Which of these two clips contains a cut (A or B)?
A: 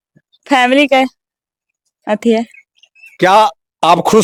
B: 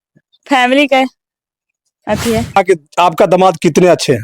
B